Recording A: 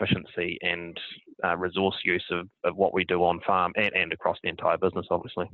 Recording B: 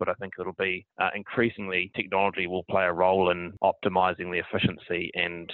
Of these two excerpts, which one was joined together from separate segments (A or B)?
B